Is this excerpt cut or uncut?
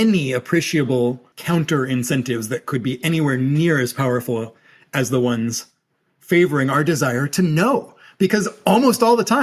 cut